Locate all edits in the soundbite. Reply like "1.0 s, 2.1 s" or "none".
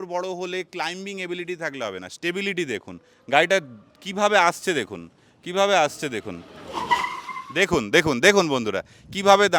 none